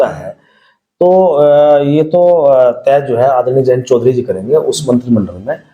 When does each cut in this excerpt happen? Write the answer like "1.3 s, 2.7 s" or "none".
none